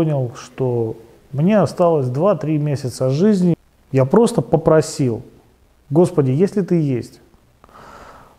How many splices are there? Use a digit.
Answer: 1